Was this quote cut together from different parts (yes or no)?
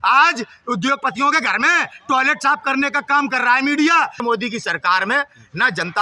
yes